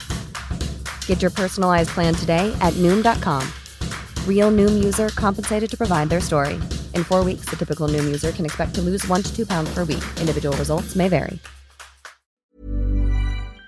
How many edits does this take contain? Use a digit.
1